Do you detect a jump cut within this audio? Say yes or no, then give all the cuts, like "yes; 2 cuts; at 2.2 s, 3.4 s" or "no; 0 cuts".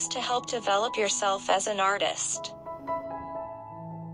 no; 0 cuts